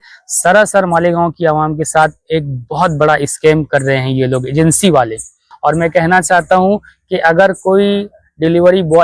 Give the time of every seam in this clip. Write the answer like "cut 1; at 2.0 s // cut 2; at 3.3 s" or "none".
cut 1; at 5.5 s